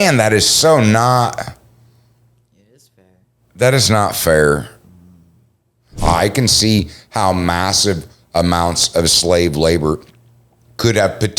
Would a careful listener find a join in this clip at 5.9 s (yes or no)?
yes